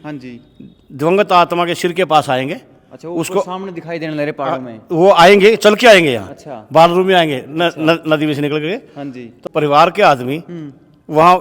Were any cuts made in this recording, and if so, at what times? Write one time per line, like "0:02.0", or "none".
0:09.3